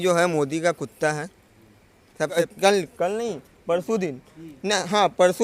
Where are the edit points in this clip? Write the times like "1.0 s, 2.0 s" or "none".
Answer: 2.4 s